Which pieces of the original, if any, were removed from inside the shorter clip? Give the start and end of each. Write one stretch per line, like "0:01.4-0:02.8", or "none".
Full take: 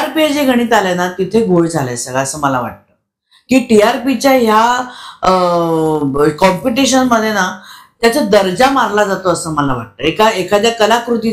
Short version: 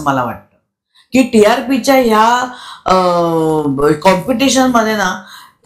none